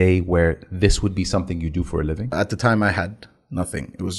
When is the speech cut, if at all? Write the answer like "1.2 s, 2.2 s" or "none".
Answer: 2.3 s